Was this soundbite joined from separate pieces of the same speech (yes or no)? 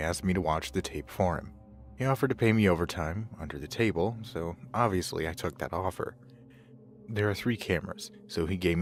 no